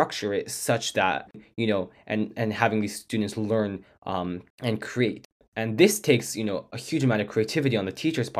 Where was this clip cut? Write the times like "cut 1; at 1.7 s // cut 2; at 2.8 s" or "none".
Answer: cut 1; at 1.3 s // cut 2; at 4.5 s // cut 3; at 5.3 s